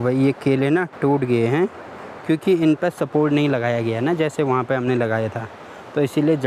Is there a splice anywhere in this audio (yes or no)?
no